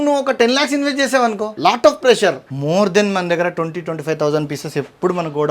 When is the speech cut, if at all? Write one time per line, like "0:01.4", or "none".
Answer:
0:01.5
0:02.5